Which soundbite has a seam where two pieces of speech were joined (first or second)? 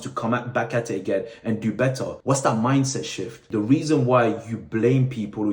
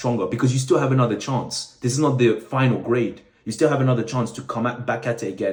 first